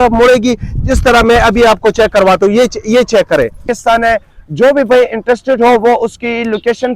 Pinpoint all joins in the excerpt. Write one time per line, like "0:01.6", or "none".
0:03.7